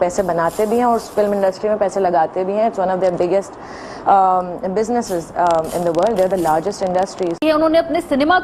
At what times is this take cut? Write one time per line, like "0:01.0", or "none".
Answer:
0:07.4